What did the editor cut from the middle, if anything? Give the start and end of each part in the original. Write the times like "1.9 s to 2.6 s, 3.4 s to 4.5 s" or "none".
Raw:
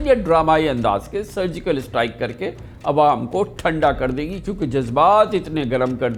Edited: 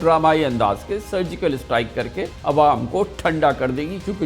2.6 s to 2.7 s